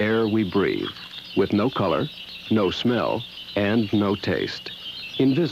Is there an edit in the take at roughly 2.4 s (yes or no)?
yes